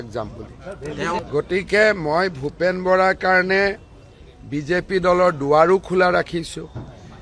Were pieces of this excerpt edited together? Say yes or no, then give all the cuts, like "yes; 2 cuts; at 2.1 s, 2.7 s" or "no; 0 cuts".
yes; 1 cut; at 1.2 s